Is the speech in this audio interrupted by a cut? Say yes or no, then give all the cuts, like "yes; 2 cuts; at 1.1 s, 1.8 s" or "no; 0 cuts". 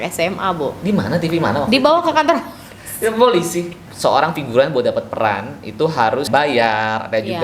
yes; 2 cuts; at 3.8 s, 6.3 s